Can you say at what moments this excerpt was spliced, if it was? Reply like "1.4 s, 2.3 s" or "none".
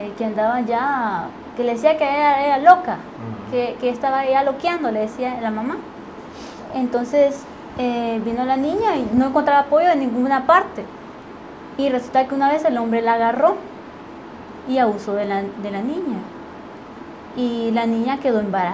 15.2 s